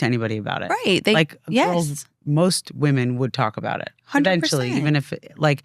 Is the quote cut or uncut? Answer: uncut